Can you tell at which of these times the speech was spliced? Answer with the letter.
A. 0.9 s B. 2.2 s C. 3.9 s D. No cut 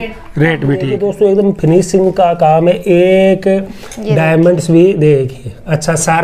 A